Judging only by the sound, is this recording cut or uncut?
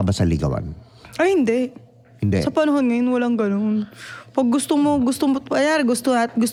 uncut